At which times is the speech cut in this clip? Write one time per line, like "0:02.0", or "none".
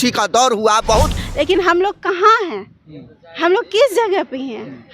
0:01.2